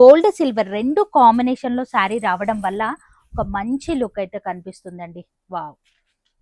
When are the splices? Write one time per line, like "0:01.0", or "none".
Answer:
none

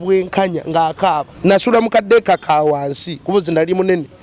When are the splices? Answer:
0:01.3

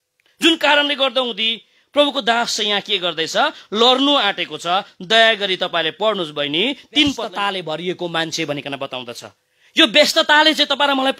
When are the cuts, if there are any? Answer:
0:07.2

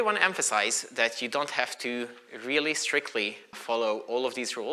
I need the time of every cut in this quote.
0:03.6

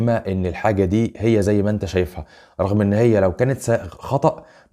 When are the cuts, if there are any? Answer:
none

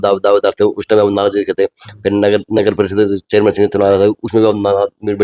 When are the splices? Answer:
none

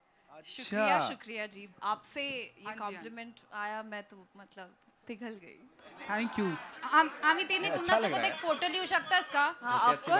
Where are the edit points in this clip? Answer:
0:06.7

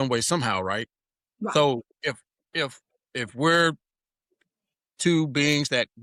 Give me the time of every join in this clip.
none

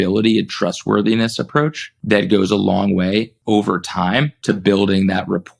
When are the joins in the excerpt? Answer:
0:01.9
0:03.3
0:04.3

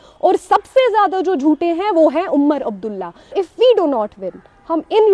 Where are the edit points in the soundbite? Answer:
0:03.3

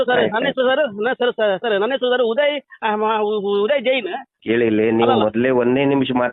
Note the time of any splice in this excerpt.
0:04.3

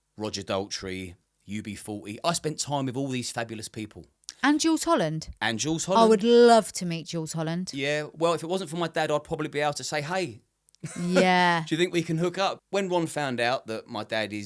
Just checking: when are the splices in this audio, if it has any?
0:12.6

